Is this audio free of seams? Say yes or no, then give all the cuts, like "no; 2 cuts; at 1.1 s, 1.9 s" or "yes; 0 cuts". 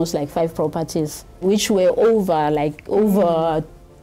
no; 1 cut; at 1.4 s